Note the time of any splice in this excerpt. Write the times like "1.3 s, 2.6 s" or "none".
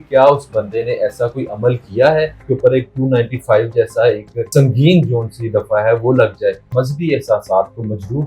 2.4 s, 4.5 s, 6.7 s